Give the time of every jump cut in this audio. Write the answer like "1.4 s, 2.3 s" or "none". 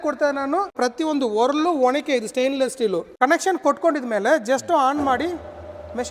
0.8 s, 3.1 s